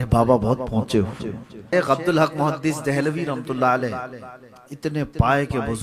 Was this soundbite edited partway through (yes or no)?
yes